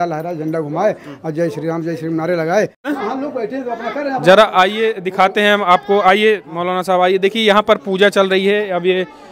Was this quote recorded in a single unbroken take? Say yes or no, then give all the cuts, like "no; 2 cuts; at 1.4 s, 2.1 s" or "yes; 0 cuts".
no; 1 cut; at 2.9 s